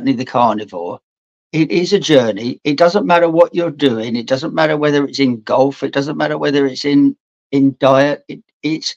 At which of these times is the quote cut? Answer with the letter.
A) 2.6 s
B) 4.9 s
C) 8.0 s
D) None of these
D